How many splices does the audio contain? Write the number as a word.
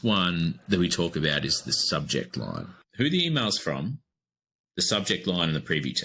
one